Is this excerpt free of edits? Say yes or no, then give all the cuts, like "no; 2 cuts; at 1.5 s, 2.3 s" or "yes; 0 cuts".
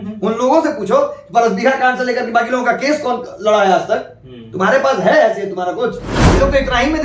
no; 1 cut; at 6.1 s